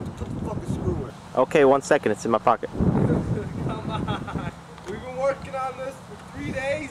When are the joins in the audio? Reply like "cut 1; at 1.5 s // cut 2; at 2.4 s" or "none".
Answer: cut 1; at 1.2 s // cut 2; at 4.5 s